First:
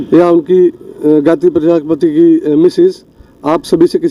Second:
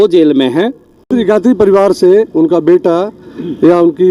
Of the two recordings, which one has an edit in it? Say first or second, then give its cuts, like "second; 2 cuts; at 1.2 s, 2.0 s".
second; 1 cut; at 1.1 s